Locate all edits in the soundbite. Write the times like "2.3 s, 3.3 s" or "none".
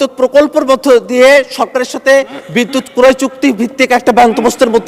none